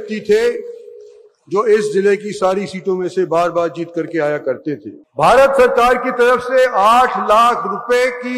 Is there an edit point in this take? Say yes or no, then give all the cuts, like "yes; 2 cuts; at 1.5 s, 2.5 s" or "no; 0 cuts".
yes; 1 cut; at 5.0 s